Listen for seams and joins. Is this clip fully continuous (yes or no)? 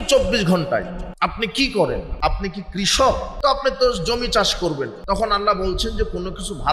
no